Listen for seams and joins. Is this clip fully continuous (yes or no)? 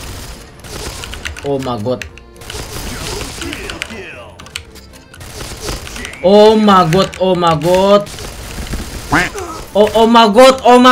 yes